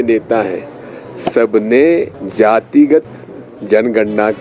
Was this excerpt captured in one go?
no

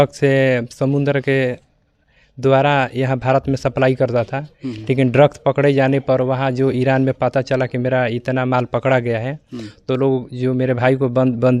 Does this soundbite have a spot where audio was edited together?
no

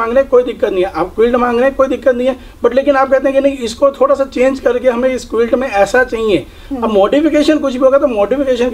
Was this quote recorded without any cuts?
yes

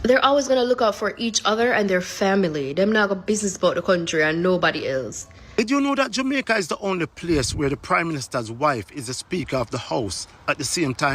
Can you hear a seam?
yes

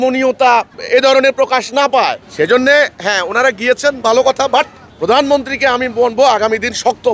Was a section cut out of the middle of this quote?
yes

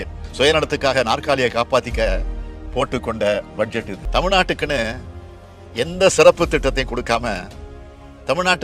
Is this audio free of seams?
no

